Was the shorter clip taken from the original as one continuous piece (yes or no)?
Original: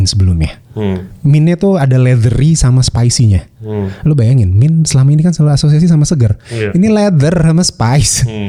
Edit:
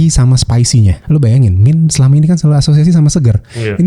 no